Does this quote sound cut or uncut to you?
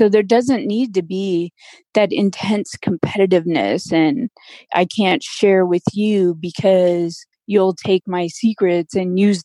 cut